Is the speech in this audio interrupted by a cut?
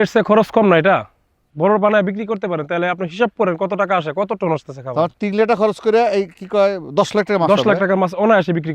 yes; 1 cut; at 1.5 s

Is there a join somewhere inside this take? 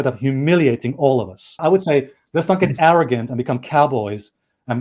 no; 0 cuts

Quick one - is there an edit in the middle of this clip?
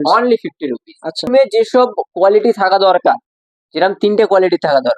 yes; 1 cut; at 1.3 s

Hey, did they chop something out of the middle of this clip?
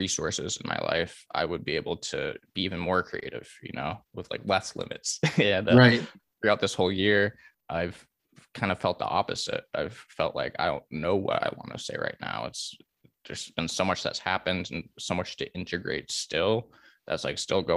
yes; 1 cut; at 7.5 s

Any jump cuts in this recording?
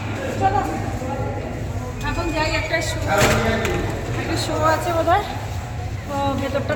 no; 0 cuts

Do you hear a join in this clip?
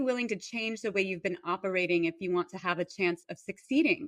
no; 0 cuts

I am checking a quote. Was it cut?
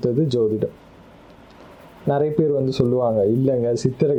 no; 0 cuts

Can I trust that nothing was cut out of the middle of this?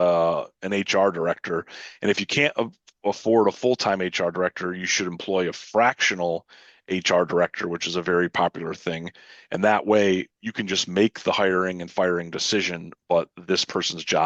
yes; 0 cuts

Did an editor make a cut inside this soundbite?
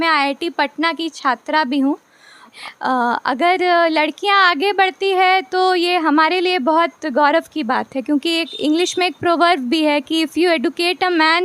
yes; 1 cut; at 2.5 s

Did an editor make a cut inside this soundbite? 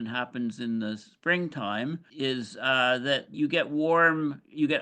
no; 0 cuts

